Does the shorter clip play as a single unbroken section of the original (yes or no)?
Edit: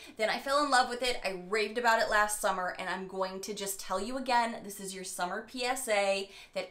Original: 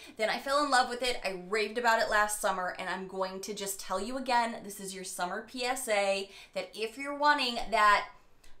yes